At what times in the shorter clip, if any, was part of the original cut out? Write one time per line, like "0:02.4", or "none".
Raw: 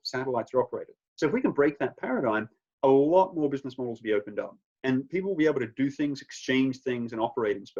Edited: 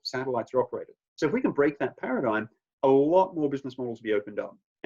none